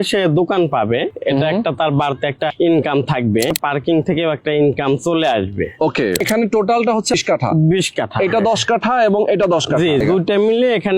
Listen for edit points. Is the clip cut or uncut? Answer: cut